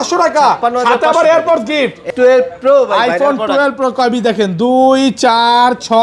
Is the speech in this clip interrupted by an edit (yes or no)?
yes